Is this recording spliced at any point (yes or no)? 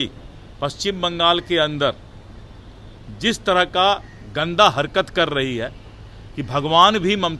no